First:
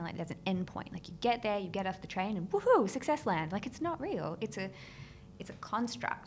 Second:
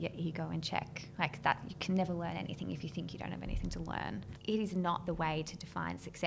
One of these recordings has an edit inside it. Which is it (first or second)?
second